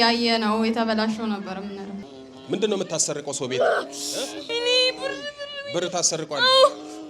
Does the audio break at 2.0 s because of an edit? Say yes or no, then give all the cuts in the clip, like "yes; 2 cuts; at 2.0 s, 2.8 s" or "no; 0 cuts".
yes; 2 cuts; at 2.0 s, 4.4 s